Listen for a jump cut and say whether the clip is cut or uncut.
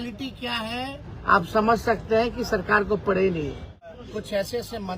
cut